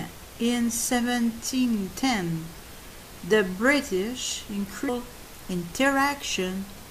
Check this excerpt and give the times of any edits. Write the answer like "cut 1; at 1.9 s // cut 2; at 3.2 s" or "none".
none